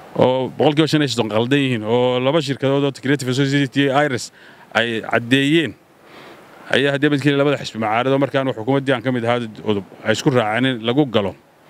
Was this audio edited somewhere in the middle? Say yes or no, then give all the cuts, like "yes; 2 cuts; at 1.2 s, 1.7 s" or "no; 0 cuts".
no; 0 cuts